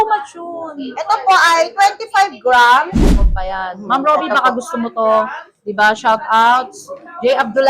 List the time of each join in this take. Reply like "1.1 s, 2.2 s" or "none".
3.2 s

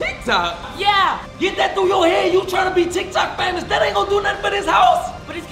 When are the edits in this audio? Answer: 1.2 s

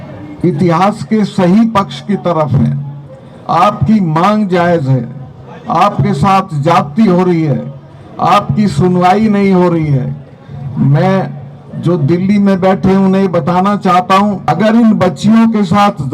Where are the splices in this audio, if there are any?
14.4 s

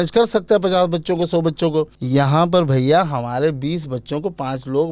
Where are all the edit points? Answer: 2.0 s

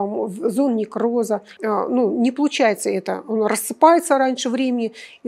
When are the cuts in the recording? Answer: 1.5 s

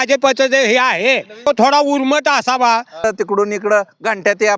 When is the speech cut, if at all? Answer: 1.5 s, 3.0 s

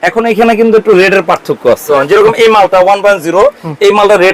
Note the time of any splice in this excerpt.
1.9 s

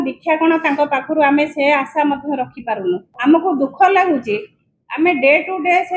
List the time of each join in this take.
3.1 s

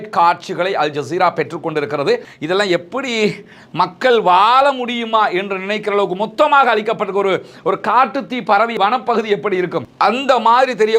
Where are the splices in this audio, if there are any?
2.3 s

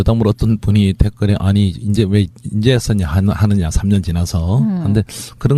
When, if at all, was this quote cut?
none

